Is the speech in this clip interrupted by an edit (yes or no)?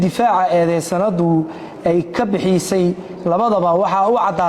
no